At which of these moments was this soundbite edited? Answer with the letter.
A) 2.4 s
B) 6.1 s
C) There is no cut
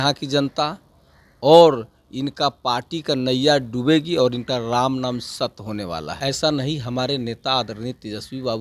B